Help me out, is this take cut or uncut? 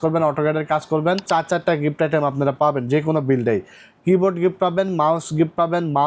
cut